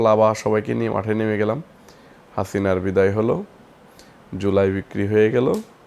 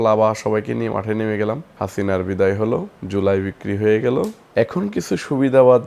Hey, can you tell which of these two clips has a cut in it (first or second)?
second